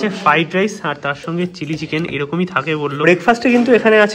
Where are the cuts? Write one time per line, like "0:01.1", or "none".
0:03.0